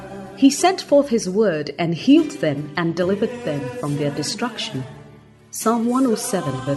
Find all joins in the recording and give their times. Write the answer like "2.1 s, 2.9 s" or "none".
none

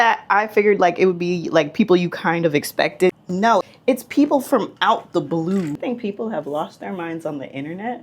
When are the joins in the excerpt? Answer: 3.2 s, 5.8 s

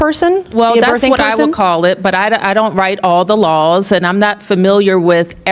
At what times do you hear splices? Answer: none

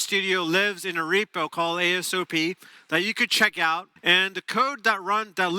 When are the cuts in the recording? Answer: 3.9 s

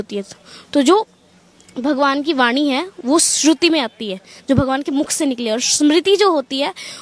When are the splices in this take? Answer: none

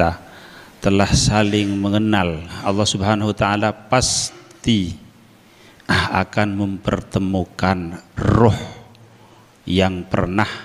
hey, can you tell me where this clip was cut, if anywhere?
2.6 s

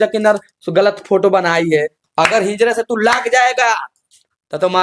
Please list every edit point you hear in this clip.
2.0 s

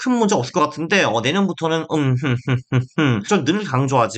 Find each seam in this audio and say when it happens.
3.2 s

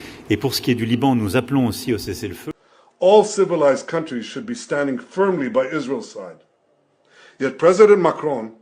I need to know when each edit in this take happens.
2.3 s

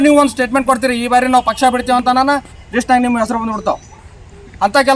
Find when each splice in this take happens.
none

